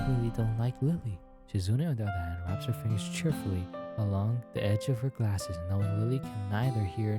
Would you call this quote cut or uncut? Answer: cut